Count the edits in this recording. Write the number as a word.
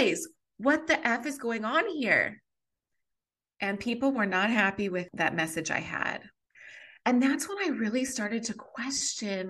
two